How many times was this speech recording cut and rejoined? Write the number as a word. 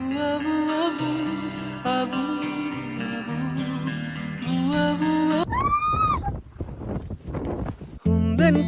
one